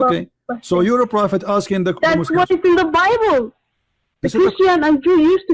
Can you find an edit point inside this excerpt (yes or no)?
no